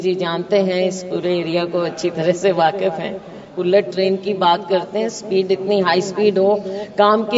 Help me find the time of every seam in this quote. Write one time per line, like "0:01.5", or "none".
0:03.5